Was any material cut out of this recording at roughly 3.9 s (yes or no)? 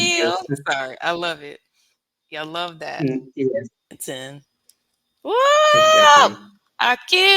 yes